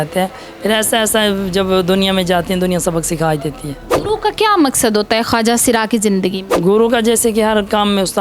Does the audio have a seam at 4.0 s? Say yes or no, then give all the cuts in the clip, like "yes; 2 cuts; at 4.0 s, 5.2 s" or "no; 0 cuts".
yes; 2 cuts; at 4.0 s, 6.5 s